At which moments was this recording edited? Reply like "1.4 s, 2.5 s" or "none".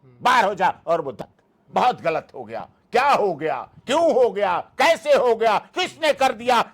1.2 s